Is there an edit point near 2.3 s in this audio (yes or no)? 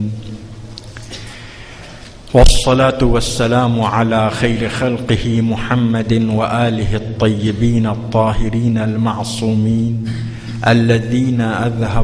no